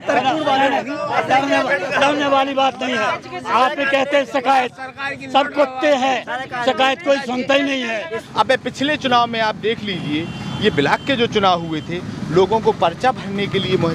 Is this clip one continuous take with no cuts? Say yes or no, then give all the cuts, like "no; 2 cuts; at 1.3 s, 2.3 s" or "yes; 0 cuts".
no; 1 cut; at 8.2 s